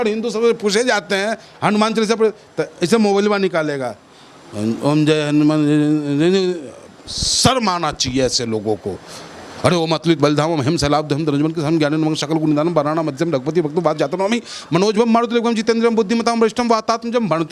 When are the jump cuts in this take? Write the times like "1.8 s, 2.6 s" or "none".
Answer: none